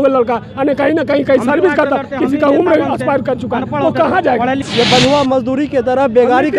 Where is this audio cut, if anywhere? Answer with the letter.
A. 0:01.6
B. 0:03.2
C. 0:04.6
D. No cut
C